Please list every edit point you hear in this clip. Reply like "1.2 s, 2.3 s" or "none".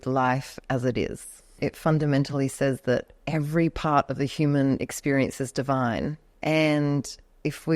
1.6 s, 3.2 s, 6.3 s

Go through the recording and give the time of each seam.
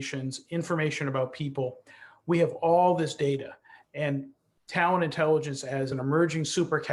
5.9 s

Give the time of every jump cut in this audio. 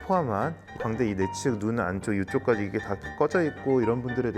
none

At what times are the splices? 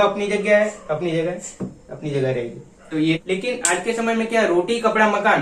3.2 s

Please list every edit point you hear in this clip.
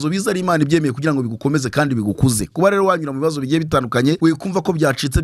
4.2 s

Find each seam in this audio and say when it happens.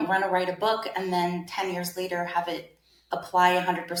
none

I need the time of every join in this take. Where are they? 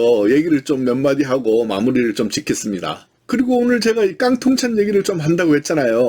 3.0 s

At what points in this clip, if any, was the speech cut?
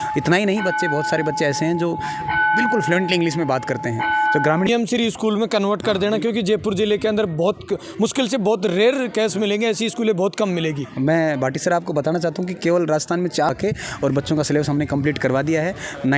4.7 s, 13.5 s

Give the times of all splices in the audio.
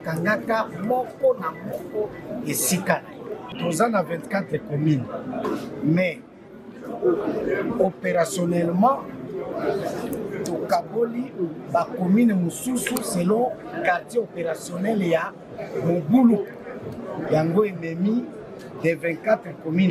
3.5 s

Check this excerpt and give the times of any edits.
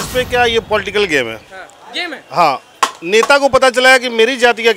none

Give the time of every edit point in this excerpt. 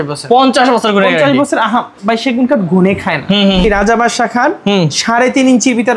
3.6 s

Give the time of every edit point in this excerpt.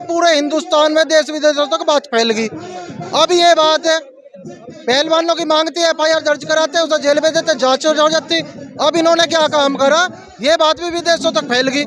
none

